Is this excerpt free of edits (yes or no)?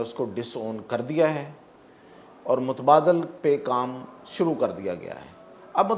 yes